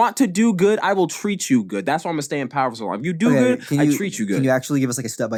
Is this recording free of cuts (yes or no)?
yes